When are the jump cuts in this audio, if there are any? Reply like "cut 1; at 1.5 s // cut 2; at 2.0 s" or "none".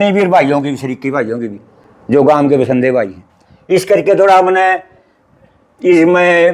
none